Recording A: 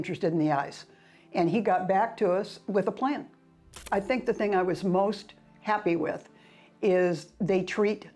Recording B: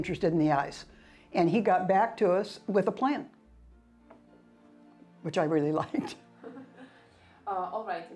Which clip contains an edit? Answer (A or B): A